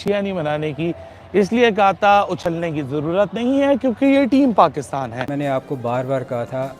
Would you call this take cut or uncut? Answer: cut